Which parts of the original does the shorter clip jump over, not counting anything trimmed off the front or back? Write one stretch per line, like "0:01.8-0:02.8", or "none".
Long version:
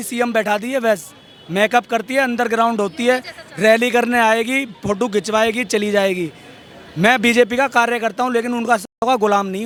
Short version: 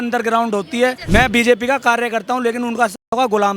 0:03.3-0:06.9